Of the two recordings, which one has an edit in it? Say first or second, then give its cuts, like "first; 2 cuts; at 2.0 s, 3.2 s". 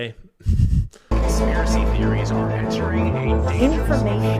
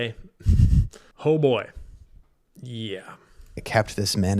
first; 1 cut; at 0.9 s